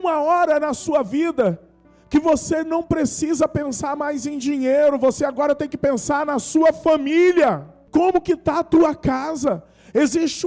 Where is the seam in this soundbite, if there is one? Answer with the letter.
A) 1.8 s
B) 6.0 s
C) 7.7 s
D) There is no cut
C